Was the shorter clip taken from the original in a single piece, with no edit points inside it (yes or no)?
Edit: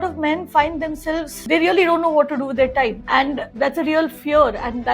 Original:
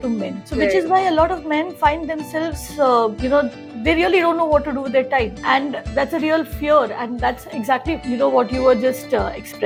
no